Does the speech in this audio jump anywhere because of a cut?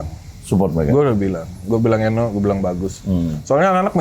no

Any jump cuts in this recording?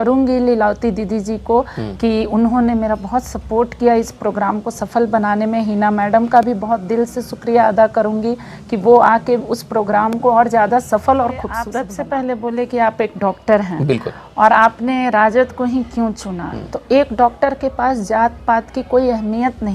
yes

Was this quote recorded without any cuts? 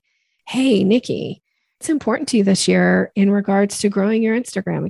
no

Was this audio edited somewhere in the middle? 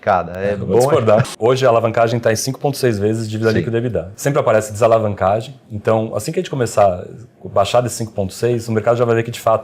yes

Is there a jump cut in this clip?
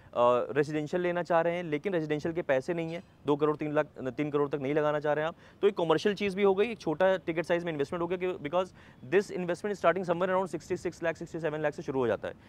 no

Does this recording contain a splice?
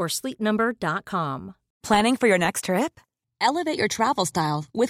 yes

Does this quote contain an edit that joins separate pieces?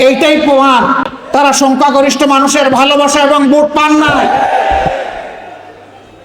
yes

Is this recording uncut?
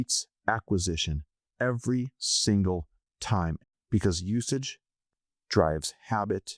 no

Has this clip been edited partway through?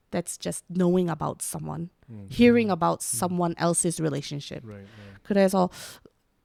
no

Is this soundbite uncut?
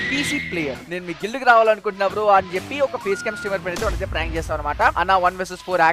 no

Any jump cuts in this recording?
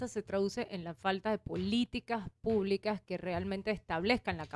no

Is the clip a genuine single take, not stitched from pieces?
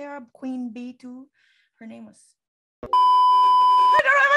yes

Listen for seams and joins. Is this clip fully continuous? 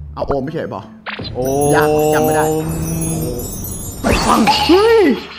yes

